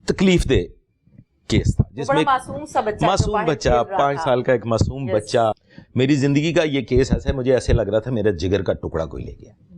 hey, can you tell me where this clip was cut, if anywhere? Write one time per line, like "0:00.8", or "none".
0:05.5